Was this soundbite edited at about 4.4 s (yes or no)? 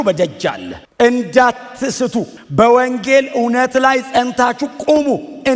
no